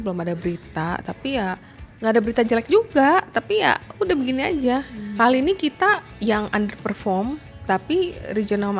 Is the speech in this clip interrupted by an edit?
yes; 1 cut; at 4.9 s

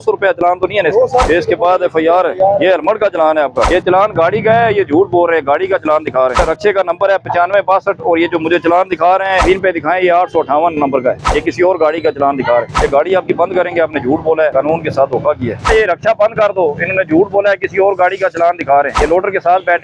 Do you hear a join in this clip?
yes; 9 cuts; at 1.2 s, 3.7 s, 6.4 s, 9.4 s, 11.3 s, 12.7 s, 14.5 s, 15.7 s, 18.9 s

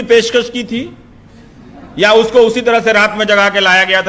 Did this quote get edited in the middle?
no; 0 cuts

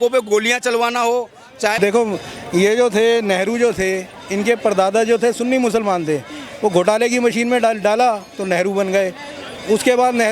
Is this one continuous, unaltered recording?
no; 1 cut; at 1.8 s

